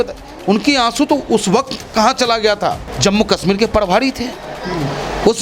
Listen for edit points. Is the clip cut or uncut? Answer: cut